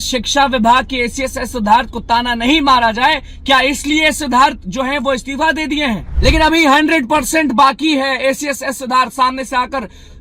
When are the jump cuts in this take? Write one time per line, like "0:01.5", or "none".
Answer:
0:06.1